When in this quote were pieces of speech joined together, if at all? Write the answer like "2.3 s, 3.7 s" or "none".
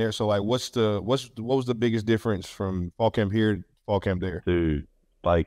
none